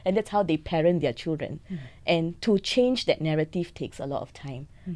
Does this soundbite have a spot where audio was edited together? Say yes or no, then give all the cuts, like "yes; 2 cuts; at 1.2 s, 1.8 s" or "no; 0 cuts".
no; 0 cuts